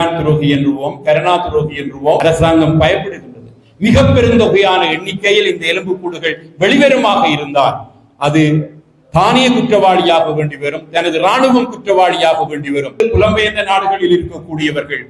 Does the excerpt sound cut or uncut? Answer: cut